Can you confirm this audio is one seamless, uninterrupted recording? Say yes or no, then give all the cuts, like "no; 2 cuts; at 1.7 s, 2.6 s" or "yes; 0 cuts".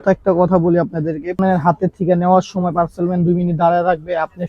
no; 1 cut; at 1.4 s